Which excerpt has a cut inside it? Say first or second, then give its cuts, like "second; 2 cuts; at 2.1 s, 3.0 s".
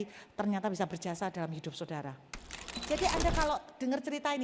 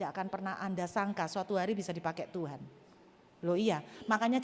first; 1 cut; at 2.8 s